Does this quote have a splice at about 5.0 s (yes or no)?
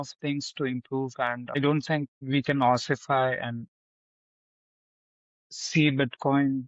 no